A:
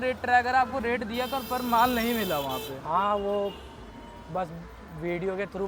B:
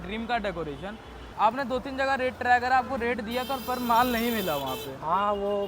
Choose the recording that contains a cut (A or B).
B